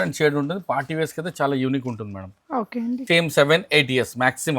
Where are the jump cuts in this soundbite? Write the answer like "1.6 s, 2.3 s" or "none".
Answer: 3.0 s

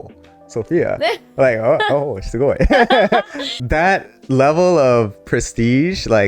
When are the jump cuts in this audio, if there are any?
3.6 s

